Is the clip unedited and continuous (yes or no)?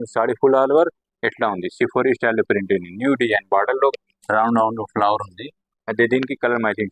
yes